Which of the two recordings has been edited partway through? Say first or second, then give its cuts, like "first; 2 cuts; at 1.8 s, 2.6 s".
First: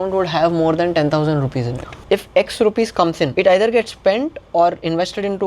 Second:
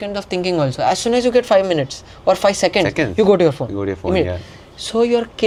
first; 2 cuts; at 2.0 s, 3.3 s